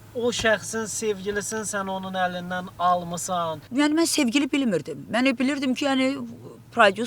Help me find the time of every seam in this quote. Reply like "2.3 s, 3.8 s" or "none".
3.6 s